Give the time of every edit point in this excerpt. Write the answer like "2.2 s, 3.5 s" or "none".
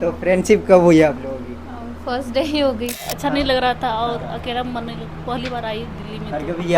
3.1 s